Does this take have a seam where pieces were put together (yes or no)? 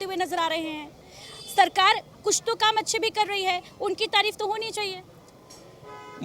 no